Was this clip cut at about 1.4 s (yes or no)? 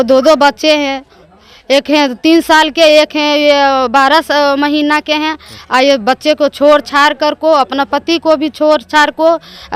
no